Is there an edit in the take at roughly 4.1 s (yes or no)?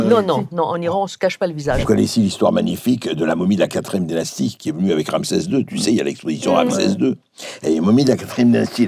no